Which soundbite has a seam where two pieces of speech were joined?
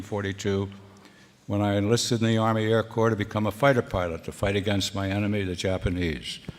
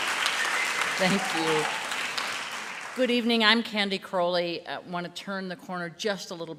first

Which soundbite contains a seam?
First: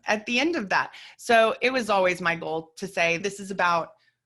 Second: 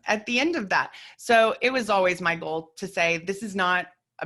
first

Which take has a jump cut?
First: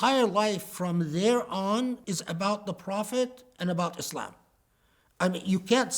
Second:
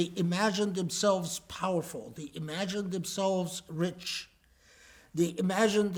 first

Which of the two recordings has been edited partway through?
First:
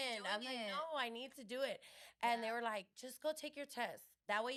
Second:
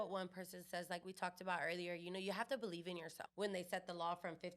second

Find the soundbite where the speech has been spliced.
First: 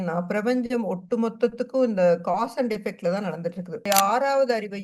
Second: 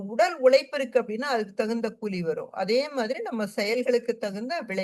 first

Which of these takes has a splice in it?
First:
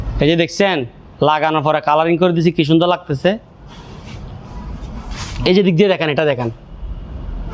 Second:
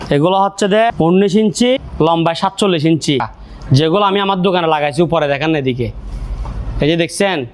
second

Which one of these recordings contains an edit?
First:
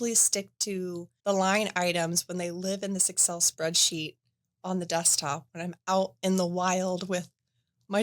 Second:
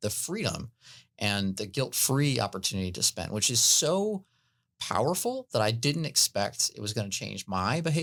first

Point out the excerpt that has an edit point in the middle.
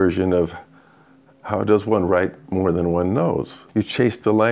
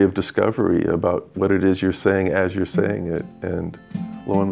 first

